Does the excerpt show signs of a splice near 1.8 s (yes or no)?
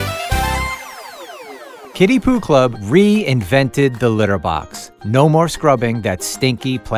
yes